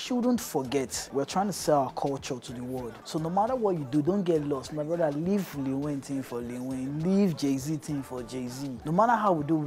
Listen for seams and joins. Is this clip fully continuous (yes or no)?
no